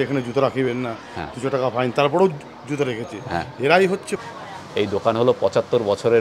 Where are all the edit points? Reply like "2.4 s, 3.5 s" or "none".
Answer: 4.2 s